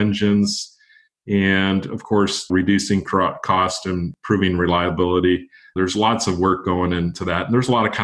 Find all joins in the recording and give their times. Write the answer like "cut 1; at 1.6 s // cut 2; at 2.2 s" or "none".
cut 1; at 2.5 s // cut 2; at 4.1 s // cut 3; at 5.6 s // cut 4; at 7.2 s